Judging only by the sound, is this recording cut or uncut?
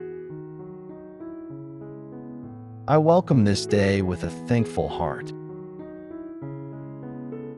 cut